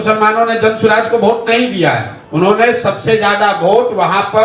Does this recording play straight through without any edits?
no; 1 cut; at 2.2 s

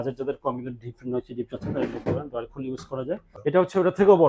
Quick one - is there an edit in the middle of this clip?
yes; 1 cut; at 3.3 s

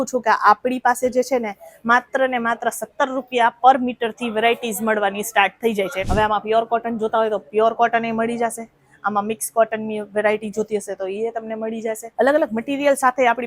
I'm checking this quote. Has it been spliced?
yes; 1 cut; at 6.0 s

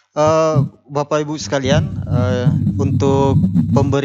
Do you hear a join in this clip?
no; 0 cuts

